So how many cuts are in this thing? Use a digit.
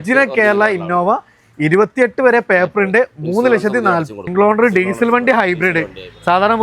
1